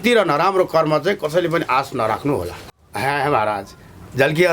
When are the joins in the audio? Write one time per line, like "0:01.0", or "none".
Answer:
0:02.6